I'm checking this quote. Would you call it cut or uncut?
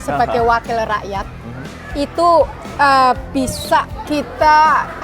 cut